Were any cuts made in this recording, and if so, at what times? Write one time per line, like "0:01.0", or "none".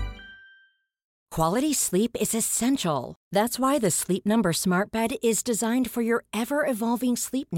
0:01.1